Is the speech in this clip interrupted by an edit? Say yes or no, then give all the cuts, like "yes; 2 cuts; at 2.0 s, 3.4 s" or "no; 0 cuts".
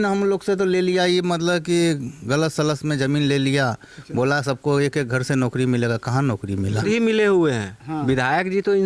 yes; 1 cut; at 6.8 s